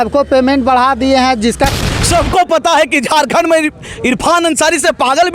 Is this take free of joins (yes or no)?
no